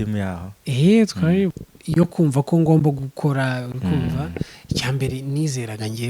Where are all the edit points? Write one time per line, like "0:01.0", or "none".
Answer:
0:01.7